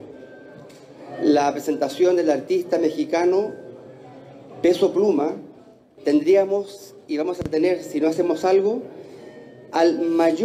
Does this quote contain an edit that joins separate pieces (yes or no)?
yes